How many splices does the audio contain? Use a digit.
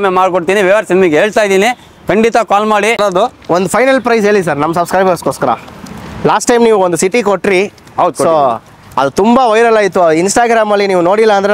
1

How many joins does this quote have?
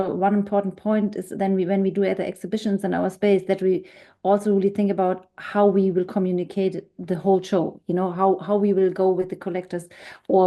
0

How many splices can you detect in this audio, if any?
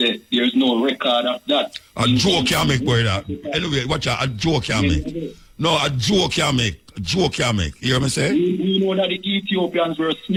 0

